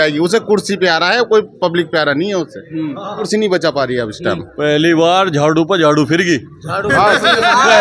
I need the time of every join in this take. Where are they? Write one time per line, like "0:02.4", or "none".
0:03.3